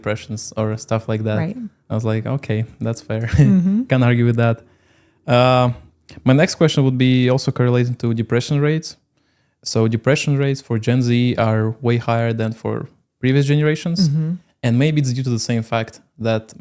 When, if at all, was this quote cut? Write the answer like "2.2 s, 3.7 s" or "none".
none